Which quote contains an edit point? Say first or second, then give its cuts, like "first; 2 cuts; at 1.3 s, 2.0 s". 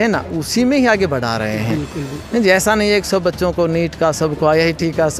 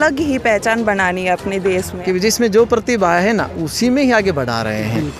second; 1 cut; at 1.9 s